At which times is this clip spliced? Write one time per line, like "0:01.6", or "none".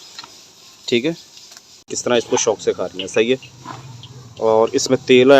0:01.9

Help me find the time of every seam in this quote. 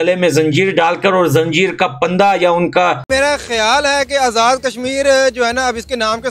0:03.0

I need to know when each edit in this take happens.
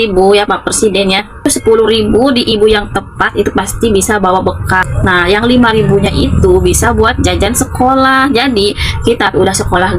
0:01.5
0:04.8

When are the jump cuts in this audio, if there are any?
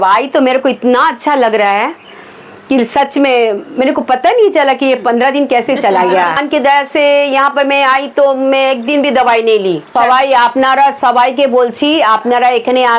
0:06.4
0:09.9

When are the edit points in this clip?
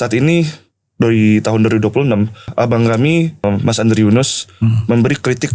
0:02.5
0:03.4

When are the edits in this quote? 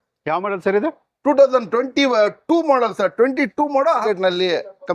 0:04.0

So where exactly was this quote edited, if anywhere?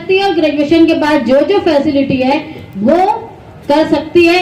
none

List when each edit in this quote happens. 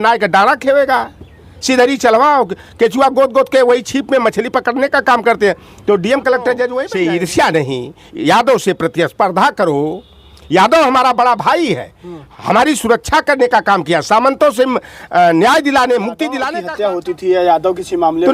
0:06.8
0:16.5

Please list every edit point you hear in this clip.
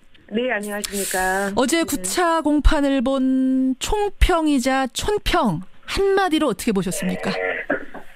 0:04.9

